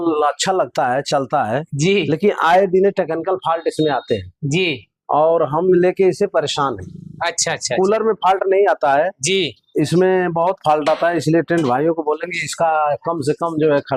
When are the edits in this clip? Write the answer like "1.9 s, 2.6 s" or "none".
none